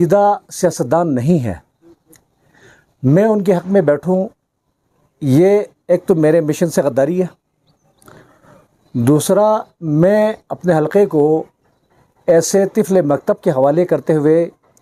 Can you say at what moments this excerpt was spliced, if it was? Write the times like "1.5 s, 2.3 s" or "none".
none